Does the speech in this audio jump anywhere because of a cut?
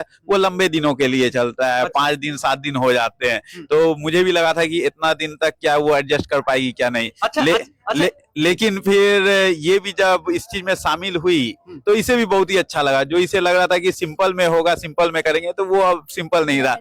no; 0 cuts

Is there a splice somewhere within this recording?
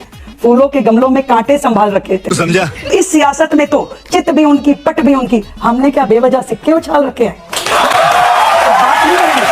yes; 1 cut; at 2.6 s

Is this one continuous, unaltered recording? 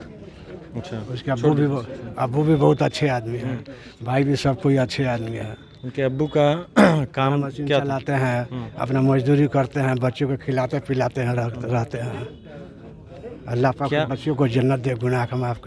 yes; 0 cuts

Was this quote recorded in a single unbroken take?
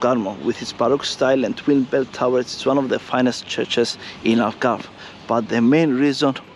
yes; 0 cuts

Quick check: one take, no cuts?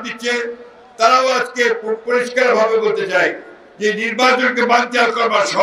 yes; 0 cuts

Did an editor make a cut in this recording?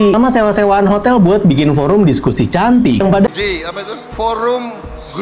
yes; 1 cut; at 3.3 s

